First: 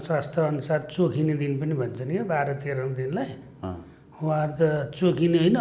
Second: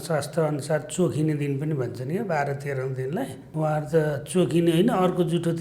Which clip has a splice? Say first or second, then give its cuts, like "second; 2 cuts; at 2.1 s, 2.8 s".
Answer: second; 1 cut; at 3.4 s